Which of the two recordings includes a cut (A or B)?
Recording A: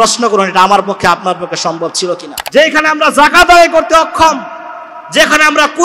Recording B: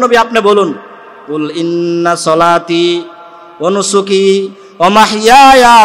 A